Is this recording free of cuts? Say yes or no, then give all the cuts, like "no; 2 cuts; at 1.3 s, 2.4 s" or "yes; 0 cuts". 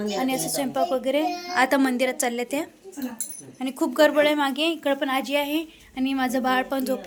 yes; 0 cuts